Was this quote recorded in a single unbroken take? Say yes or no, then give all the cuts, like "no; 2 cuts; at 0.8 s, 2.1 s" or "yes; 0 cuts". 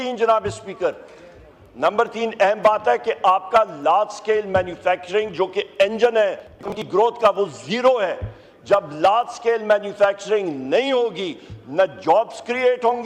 no; 1 cut; at 6.7 s